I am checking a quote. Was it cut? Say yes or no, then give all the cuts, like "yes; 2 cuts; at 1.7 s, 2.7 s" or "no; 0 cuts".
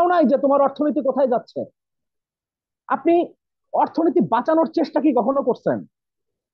no; 0 cuts